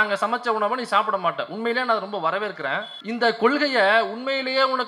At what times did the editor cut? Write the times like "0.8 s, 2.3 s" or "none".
2.9 s